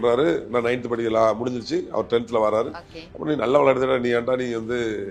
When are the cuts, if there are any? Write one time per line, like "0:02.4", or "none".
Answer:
none